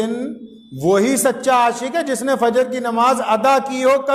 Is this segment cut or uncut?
uncut